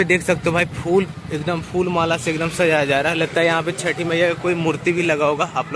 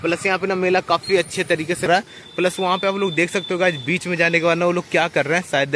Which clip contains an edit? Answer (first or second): second